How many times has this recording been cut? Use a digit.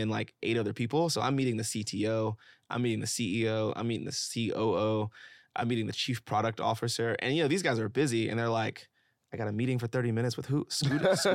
0